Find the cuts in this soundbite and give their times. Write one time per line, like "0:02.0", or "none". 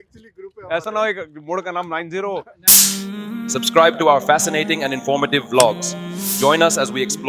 0:02.6